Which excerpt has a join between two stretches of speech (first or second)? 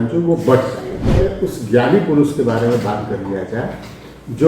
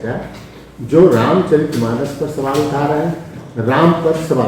first